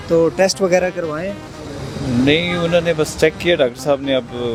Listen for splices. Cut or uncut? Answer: uncut